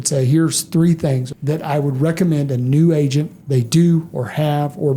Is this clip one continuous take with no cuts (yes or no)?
no